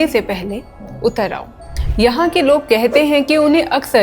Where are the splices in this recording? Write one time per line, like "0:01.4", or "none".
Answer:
0:01.7